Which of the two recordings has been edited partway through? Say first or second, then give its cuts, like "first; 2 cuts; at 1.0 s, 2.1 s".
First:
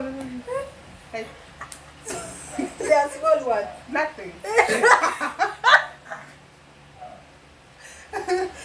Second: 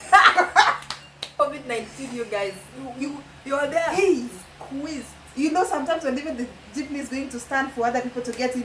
second; 1 cut; at 1.3 s